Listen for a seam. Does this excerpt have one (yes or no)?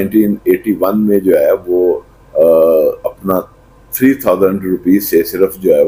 no